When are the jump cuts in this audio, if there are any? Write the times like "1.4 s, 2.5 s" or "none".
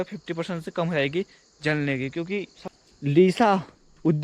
2.6 s